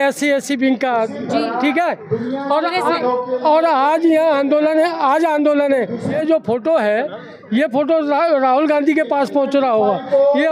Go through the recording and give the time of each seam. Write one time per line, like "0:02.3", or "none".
0:06.1